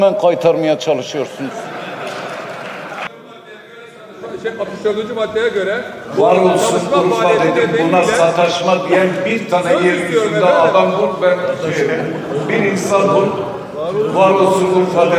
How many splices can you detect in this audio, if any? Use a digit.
1